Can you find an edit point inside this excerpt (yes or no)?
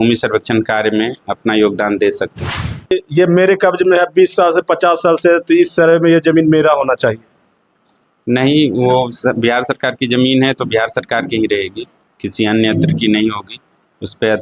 yes